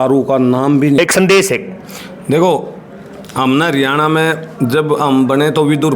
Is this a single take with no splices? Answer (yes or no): no